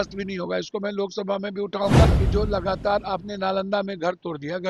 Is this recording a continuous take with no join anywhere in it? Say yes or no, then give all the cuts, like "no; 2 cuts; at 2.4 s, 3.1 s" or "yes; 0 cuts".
no; 1 cut; at 2.1 s